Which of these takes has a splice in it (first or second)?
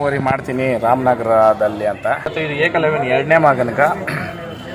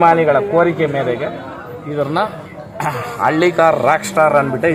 first